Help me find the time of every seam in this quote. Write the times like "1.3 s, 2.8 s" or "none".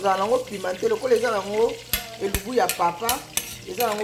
none